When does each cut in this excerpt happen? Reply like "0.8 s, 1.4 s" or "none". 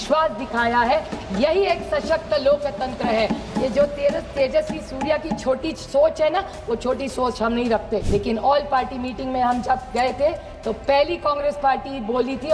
8.0 s

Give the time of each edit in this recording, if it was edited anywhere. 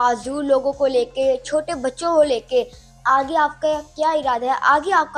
none

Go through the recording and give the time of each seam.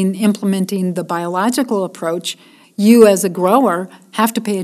none

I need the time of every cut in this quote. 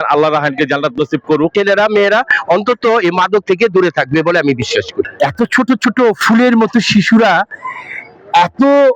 1.5 s

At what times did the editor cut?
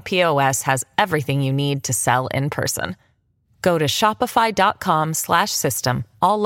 none

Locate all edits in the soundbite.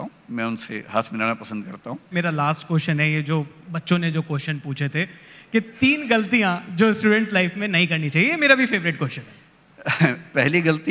2.1 s

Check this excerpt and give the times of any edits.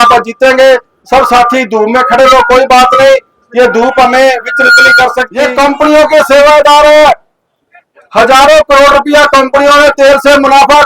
5.3 s

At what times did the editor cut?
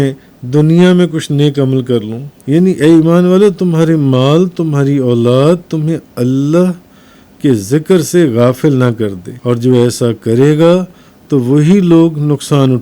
2.3 s, 9.3 s

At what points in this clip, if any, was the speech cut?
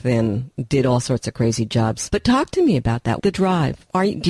2.0 s, 3.2 s

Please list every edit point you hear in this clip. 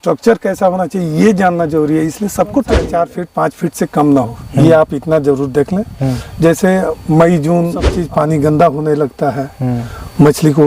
2.9 s, 7.9 s

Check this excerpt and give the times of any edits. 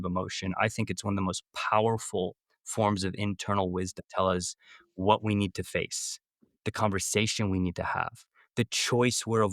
4.0 s

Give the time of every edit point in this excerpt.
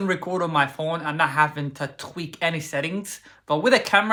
none

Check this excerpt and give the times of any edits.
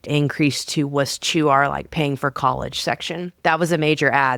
3.3 s

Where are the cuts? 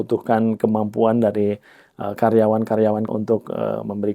3.1 s

